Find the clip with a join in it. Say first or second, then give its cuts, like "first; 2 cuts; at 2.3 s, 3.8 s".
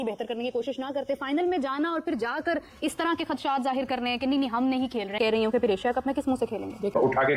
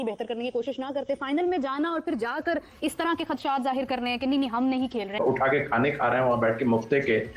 second; 1 cut; at 5.1 s